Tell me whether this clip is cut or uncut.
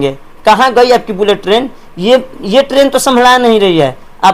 uncut